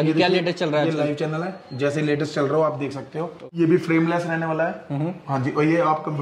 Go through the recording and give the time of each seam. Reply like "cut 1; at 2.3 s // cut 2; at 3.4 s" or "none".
cut 1; at 3.4 s